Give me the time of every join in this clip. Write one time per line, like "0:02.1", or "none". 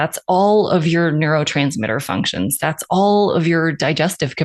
none